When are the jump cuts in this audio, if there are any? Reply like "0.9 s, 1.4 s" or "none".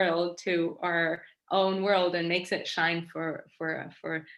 none